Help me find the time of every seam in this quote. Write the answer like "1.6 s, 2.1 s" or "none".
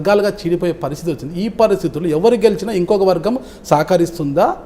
none